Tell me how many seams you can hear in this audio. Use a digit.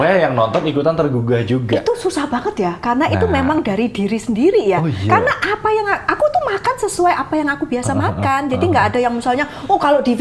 0